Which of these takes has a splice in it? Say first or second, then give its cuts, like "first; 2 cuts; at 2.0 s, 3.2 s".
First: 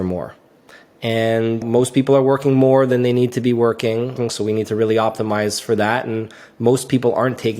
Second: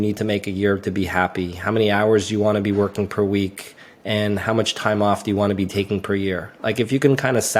first; 2 cuts; at 1.6 s, 4.2 s